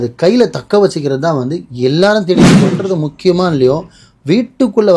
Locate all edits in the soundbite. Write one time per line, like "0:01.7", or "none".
0:02.8